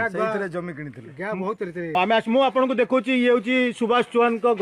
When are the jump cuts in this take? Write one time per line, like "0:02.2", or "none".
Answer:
0:02.0

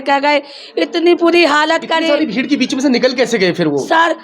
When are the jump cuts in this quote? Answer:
none

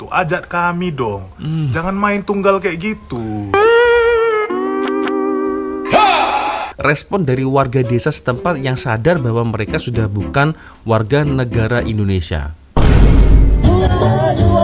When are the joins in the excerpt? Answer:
0:06.7

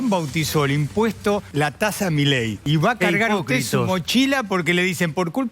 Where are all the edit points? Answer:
0:01.5
0:02.6

